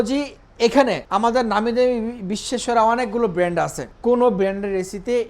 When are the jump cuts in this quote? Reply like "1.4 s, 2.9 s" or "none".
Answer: 1.0 s, 3.8 s